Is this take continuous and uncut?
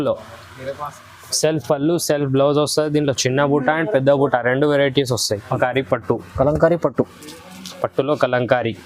no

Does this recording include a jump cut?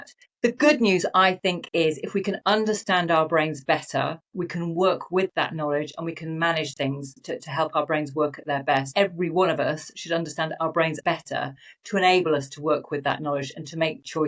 yes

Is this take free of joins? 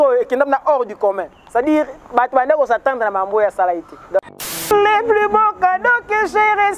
no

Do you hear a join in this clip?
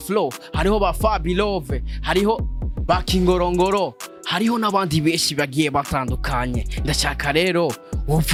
no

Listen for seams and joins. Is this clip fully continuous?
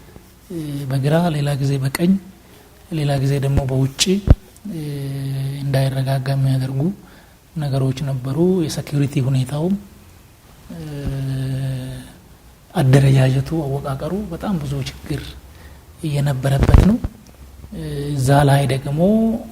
yes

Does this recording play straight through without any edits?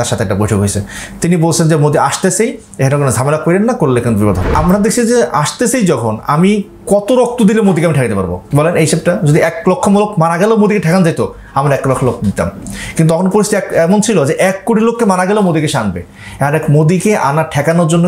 no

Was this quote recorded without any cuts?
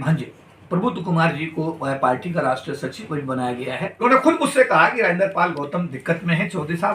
no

